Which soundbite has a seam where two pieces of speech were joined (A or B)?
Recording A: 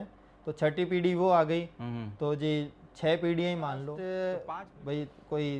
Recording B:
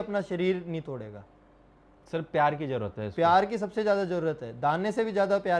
A